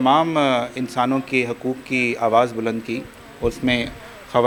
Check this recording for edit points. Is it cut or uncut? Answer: uncut